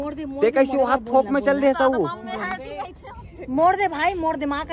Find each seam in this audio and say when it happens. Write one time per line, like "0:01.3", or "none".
none